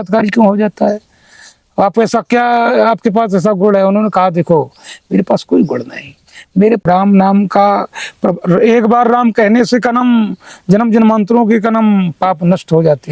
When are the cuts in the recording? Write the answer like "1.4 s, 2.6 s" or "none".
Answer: 6.8 s